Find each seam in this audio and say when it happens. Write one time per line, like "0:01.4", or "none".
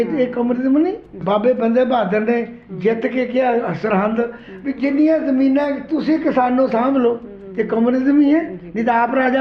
0:01.2

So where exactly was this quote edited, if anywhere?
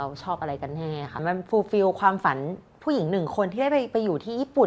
0:01.2

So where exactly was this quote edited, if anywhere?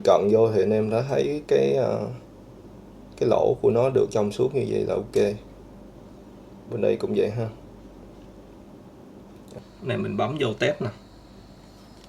0:09.5

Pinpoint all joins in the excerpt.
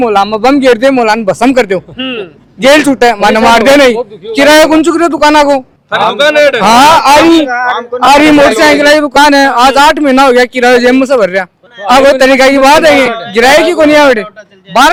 none

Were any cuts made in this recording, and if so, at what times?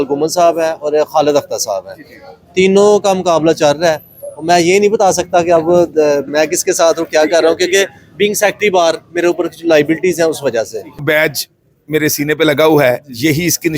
0:11.0

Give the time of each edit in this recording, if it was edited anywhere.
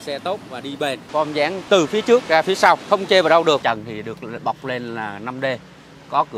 0:01.3
0:02.8
0:03.6

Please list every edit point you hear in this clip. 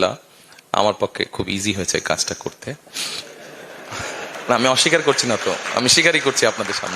none

